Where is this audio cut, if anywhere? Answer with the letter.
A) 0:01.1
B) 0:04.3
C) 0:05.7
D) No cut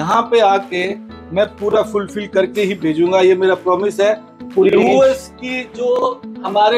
B